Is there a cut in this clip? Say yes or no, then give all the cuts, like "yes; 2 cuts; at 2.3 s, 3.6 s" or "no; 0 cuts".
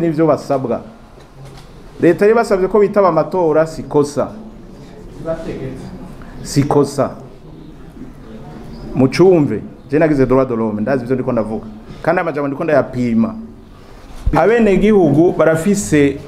yes; 1 cut; at 14.3 s